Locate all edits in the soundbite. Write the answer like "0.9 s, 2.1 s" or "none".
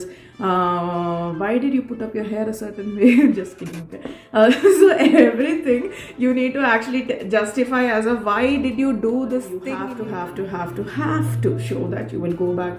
9.8 s